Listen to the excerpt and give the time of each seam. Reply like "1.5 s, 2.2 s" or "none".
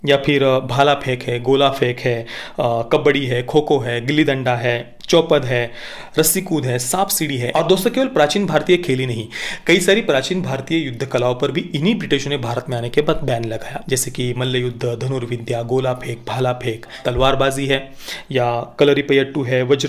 7.4 s, 13.7 s, 17.0 s